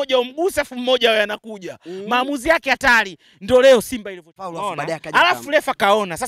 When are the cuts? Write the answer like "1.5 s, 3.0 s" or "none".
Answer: 4.5 s